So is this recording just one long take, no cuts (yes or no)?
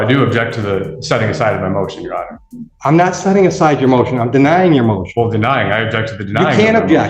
yes